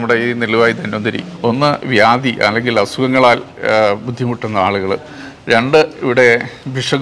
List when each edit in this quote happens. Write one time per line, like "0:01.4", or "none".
0:01.3